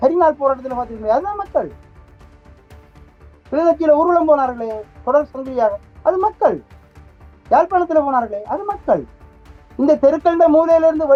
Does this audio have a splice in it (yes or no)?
no